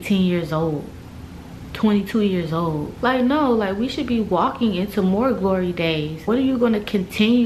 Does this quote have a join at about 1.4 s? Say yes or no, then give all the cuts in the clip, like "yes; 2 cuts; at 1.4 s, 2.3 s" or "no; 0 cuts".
no; 2 cuts; at 2.9 s, 6.3 s